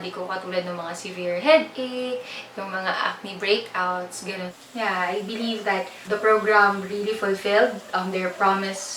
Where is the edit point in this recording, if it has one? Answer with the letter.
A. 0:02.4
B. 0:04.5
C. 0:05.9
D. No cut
B